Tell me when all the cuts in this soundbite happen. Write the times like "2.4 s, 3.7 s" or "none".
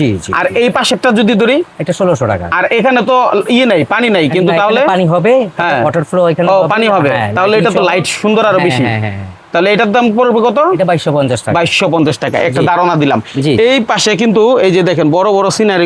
none